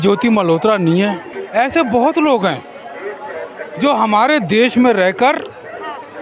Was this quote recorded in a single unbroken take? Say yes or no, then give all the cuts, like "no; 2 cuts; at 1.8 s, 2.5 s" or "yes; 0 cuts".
no; 1 cut; at 1.3 s